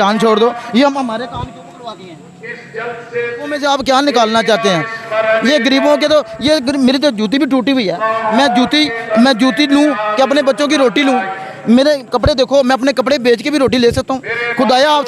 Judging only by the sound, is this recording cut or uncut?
cut